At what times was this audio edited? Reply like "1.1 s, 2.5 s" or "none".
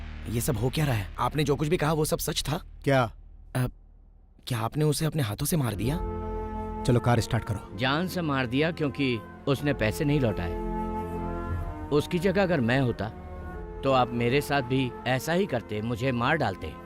1.1 s